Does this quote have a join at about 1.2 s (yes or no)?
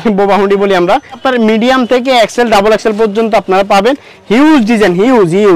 yes